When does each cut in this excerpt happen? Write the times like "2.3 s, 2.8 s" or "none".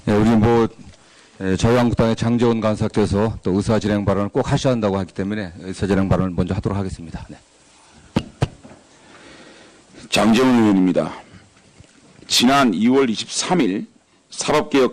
6.5 s